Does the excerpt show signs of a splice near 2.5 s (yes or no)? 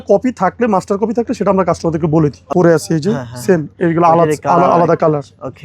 yes